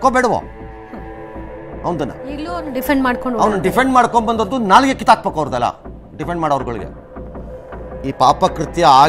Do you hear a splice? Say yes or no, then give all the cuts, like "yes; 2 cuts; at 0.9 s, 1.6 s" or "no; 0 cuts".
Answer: no; 0 cuts